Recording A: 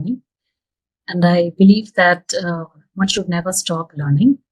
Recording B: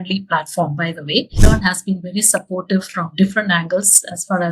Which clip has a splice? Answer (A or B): B